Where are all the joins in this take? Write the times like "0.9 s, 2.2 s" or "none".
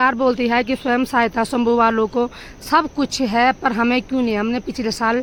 none